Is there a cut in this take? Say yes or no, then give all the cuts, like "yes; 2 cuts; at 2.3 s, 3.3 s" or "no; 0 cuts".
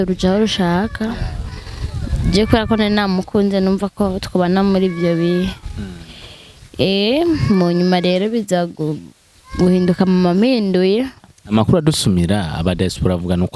yes; 1 cut; at 11.3 s